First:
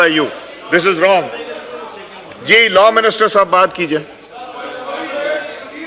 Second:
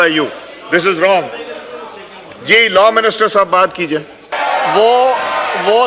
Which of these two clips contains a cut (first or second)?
second